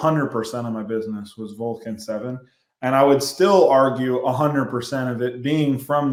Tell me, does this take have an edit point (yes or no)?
no